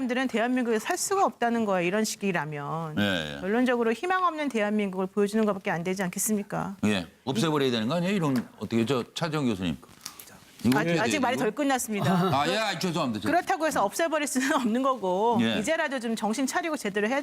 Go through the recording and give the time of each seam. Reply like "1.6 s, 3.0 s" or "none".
6.0 s